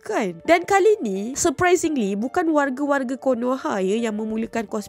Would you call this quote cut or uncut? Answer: uncut